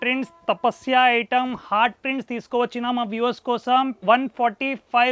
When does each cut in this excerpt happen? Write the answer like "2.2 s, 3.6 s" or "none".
4.0 s